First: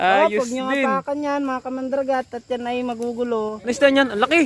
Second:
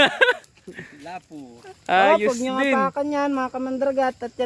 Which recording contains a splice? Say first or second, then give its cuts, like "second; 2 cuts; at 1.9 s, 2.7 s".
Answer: first; 1 cut; at 3.6 s